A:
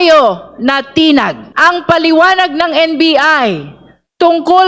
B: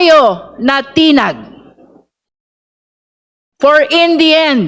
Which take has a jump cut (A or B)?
A